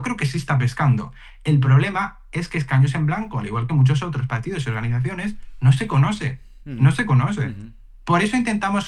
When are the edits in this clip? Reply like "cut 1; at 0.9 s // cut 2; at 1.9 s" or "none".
none

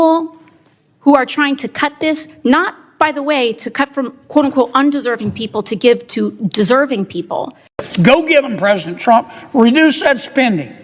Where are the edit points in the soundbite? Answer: cut 1; at 7.7 s

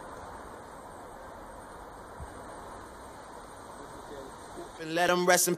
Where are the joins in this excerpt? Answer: none

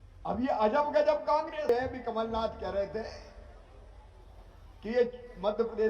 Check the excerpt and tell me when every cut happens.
cut 1; at 1.7 s

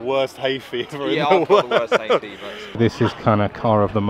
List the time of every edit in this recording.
cut 1; at 2.7 s

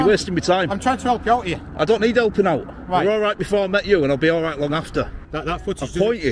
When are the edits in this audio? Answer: cut 1; at 5.2 s

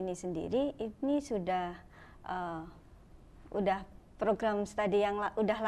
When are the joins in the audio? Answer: none

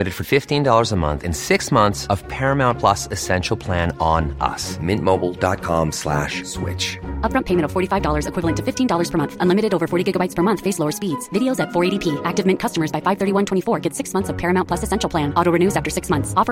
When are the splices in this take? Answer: none

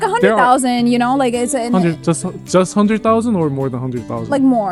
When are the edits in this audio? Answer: none

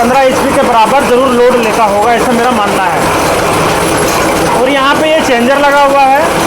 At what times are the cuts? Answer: none

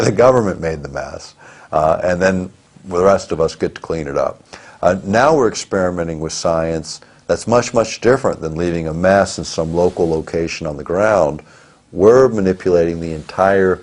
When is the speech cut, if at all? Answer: cut 1; at 6.1 s

